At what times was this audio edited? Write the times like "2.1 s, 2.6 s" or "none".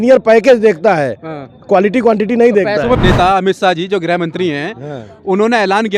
3.0 s

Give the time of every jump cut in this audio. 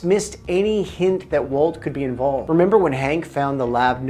2.4 s

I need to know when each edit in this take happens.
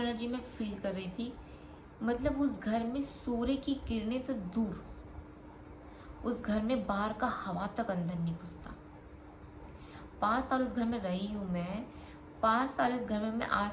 none

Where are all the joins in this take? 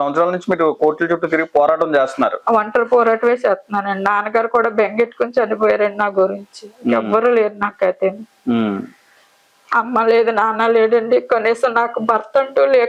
none

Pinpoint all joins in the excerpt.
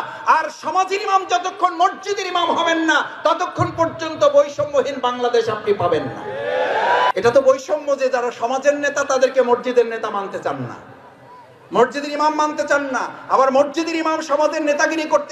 7.1 s

